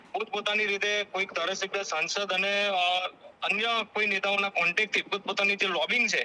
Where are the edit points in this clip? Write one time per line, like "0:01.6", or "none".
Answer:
none